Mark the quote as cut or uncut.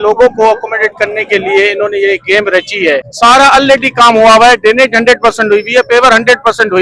cut